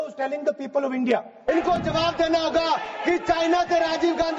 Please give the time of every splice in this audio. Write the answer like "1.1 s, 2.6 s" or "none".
1.4 s